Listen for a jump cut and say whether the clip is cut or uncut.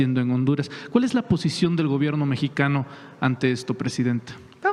uncut